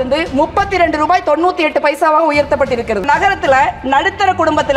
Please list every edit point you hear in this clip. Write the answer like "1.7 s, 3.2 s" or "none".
3.0 s